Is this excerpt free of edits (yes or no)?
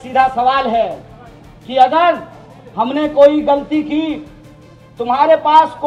yes